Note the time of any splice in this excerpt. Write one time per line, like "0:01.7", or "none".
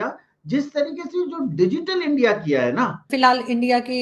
0:03.1